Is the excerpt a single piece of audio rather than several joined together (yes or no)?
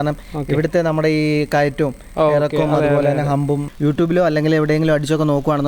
no